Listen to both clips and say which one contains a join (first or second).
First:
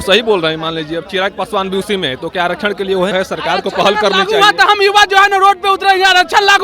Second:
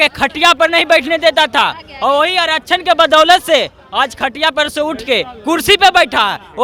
first